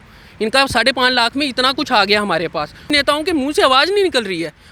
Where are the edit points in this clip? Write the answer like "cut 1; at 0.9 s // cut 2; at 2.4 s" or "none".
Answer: cut 1; at 2.9 s